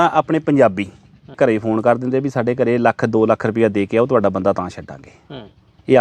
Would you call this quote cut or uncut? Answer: cut